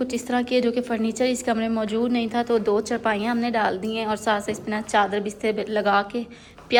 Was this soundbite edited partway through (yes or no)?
no